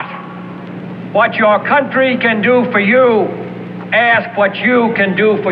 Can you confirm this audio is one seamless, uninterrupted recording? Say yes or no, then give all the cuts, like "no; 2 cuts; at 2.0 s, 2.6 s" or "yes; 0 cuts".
yes; 0 cuts